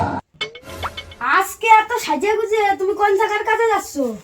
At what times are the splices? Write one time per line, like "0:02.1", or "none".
0:01.0